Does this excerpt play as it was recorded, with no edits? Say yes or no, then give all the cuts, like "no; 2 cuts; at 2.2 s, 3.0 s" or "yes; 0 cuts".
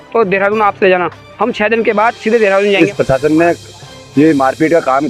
no; 1 cut; at 2.8 s